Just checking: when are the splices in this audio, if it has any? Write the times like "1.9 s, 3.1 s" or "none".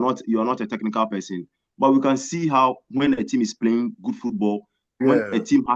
none